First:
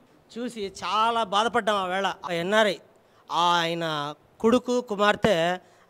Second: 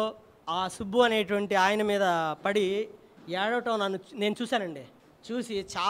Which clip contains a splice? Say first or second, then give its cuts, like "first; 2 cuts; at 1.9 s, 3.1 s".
first; 1 cut; at 2.3 s